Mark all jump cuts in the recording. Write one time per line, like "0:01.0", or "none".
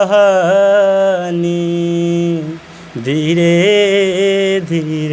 none